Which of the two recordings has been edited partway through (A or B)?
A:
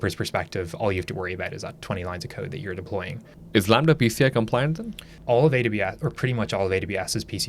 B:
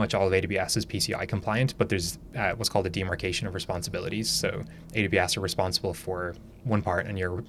A